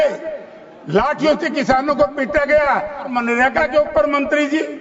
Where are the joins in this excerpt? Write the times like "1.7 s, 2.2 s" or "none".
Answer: 3.1 s